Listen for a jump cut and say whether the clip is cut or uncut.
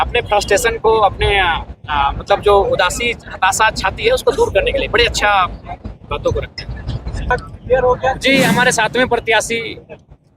cut